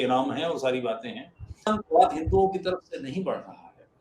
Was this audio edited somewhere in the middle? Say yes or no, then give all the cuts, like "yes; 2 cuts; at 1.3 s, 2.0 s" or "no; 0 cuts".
yes; 1 cut; at 1.7 s